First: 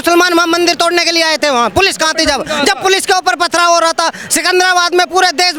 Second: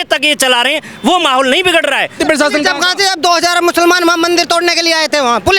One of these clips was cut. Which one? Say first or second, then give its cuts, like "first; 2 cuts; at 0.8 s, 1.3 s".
second; 1 cut; at 2.2 s